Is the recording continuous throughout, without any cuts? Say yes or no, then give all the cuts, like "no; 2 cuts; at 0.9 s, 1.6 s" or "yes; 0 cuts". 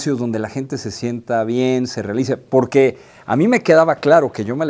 yes; 0 cuts